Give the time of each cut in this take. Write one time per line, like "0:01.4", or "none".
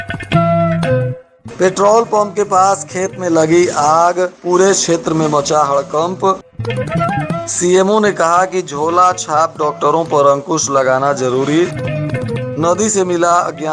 0:01.2

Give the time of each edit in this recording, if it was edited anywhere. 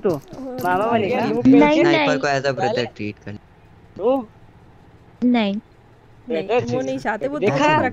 0:01.1

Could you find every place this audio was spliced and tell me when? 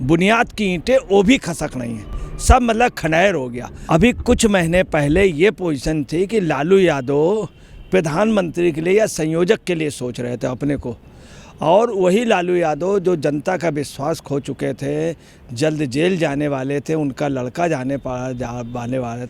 none

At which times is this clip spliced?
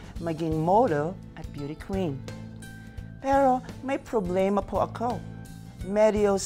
none

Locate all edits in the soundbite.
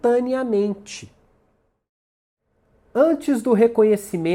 0:01.8

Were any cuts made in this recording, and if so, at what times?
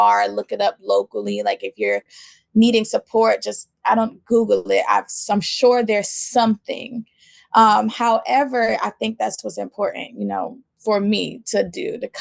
none

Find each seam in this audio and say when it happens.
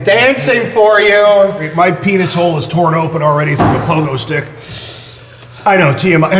0:01.7
0:05.4

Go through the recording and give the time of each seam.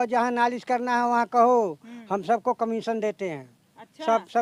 none

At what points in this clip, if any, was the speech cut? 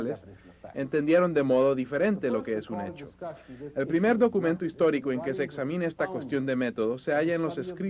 0:04.7

